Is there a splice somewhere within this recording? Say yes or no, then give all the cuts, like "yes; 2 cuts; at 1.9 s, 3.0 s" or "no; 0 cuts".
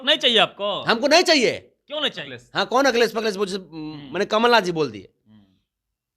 yes; 1 cut; at 2.2 s